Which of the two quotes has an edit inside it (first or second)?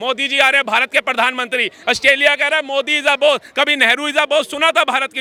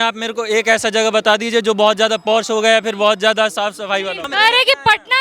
second